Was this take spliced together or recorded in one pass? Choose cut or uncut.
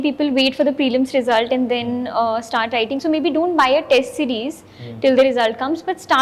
uncut